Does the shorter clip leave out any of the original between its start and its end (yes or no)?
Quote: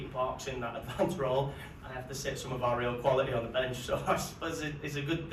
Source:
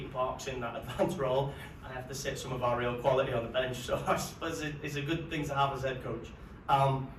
no